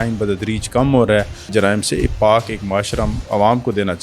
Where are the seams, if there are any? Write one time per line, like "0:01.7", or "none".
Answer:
0:01.5